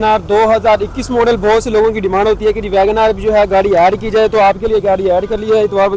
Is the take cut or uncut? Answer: uncut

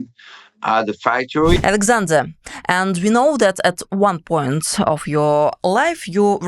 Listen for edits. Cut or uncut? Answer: cut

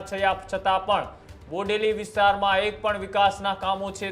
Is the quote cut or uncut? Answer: uncut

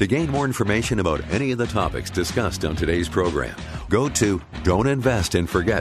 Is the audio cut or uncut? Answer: cut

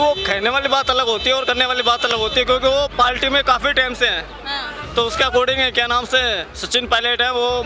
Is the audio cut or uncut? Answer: uncut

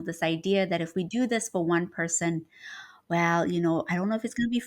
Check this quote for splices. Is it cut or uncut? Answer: uncut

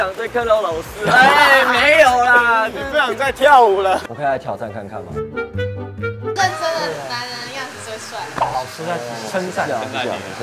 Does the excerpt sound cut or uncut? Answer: cut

